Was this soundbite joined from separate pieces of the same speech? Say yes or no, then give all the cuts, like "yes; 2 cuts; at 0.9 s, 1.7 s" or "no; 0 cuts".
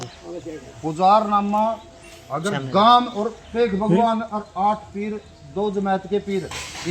no; 0 cuts